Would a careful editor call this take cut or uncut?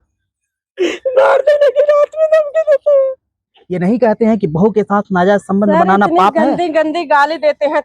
cut